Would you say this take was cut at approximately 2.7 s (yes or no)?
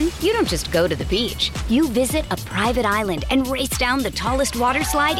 no